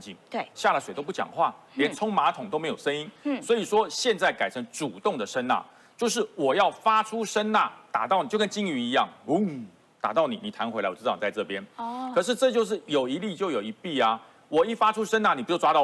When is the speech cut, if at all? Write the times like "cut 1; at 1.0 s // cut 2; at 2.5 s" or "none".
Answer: none